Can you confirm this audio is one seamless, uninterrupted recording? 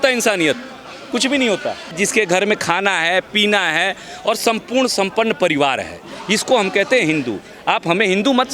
no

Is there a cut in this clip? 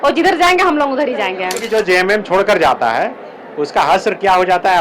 yes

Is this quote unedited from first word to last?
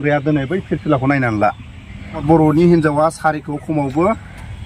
no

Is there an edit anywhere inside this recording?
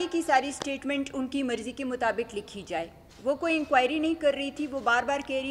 no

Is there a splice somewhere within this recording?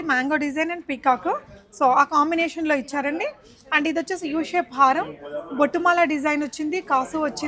no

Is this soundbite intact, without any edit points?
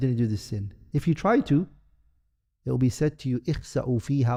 yes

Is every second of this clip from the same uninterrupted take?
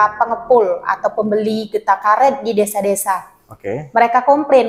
yes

